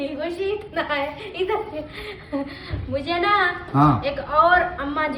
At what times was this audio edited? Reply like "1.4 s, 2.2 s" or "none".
none